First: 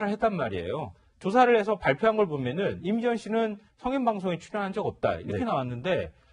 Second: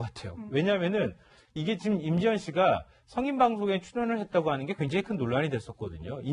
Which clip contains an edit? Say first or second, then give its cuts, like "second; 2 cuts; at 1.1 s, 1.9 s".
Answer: first; 1 cut; at 2.0 s